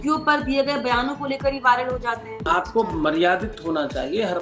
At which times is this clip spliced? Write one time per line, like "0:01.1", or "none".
0:02.5